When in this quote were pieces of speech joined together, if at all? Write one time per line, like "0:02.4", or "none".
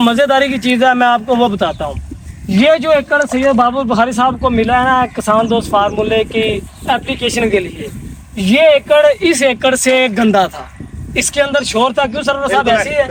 none